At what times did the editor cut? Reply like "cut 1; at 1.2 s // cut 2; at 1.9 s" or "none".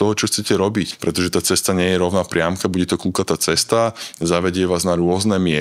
cut 1; at 0.9 s